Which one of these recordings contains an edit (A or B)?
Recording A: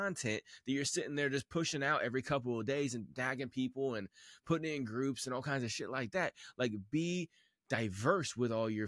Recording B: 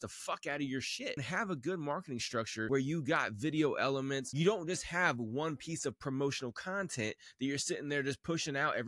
B